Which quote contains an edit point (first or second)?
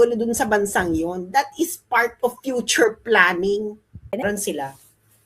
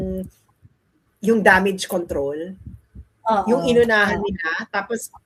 first